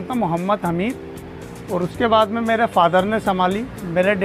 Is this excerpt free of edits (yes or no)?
yes